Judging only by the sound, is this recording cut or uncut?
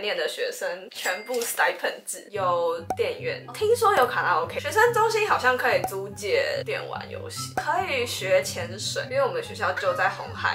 cut